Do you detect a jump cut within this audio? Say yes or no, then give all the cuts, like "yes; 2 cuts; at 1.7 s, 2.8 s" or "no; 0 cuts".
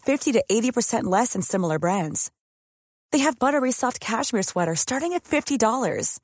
no; 0 cuts